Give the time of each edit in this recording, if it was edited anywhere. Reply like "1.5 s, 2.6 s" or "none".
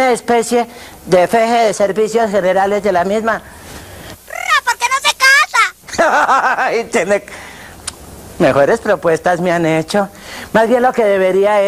1.7 s